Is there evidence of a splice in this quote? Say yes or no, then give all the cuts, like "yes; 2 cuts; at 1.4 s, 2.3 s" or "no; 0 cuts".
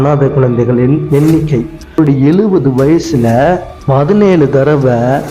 yes; 1 cut; at 2.0 s